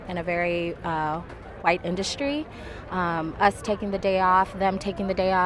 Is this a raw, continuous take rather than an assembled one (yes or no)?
yes